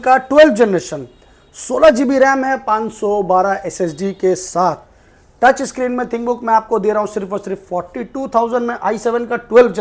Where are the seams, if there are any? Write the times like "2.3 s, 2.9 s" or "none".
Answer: none